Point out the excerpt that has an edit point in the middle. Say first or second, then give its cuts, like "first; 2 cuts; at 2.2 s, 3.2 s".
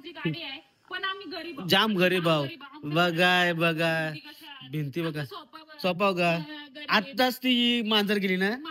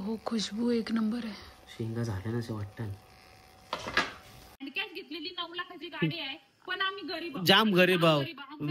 second; 1 cut; at 4.6 s